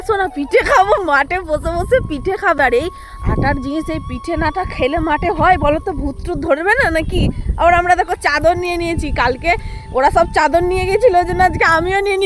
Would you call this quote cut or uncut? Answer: uncut